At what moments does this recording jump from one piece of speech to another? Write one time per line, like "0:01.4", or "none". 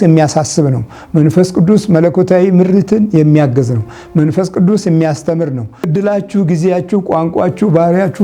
0:05.9